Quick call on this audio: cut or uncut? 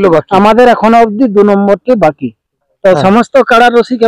cut